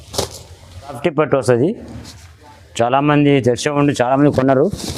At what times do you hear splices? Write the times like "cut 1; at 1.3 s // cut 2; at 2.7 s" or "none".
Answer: cut 1; at 1.0 s